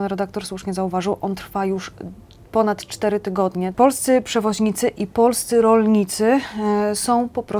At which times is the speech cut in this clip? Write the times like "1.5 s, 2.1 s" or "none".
3.7 s